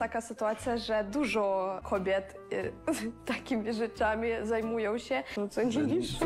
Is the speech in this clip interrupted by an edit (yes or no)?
yes